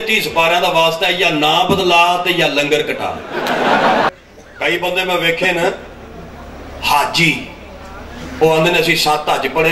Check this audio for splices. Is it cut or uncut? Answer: cut